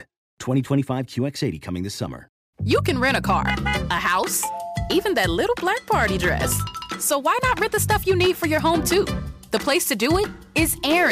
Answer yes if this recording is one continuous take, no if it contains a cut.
no